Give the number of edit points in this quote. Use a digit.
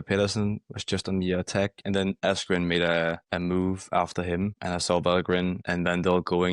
4